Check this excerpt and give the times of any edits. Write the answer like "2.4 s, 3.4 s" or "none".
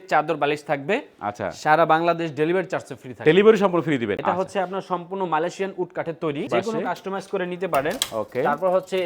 4.2 s, 6.5 s